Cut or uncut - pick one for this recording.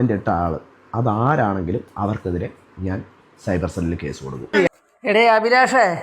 cut